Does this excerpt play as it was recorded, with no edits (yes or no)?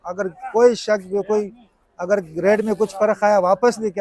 yes